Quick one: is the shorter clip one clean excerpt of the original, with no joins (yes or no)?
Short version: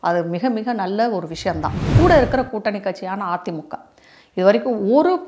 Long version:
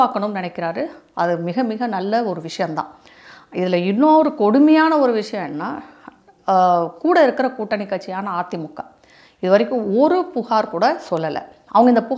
no